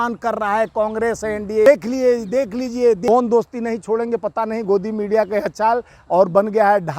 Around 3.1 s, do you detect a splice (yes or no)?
yes